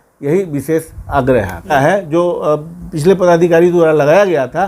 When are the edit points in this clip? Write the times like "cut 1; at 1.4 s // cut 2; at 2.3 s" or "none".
cut 1; at 1.7 s